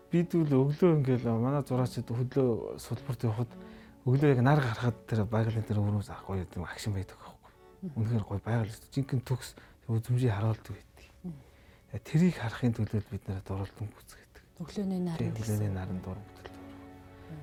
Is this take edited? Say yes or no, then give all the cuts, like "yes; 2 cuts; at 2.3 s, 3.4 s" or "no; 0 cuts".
no; 0 cuts